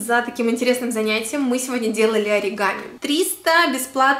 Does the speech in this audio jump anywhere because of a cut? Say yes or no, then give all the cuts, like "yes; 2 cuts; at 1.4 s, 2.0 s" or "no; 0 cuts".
yes; 1 cut; at 2.9 s